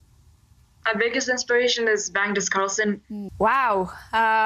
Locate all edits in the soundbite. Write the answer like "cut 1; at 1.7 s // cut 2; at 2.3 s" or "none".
cut 1; at 3.2 s